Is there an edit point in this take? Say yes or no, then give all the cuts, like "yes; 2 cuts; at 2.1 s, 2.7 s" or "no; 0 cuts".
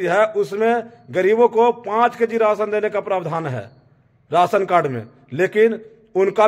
no; 0 cuts